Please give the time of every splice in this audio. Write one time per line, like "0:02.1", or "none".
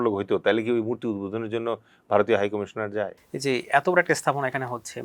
0:03.2